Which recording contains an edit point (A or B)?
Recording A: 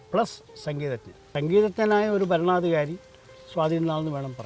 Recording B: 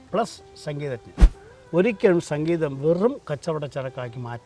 B